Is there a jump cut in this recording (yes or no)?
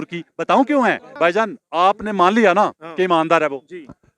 yes